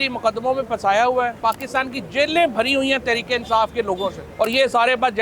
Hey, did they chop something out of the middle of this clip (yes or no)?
yes